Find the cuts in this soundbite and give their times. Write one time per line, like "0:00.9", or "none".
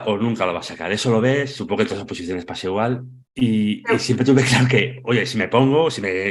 0:03.2